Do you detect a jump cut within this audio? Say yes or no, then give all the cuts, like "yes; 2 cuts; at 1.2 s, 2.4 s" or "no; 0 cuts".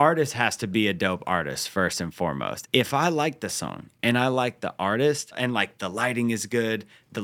yes; 2 cuts; at 2.6 s, 5.3 s